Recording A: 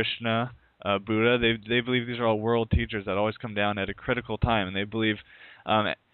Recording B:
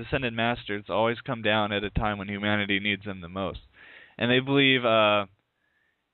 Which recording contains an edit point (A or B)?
A